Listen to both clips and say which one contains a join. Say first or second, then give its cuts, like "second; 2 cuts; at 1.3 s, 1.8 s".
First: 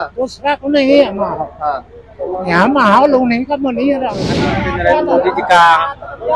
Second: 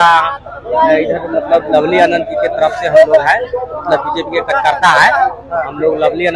first; 1 cut; at 4.6 s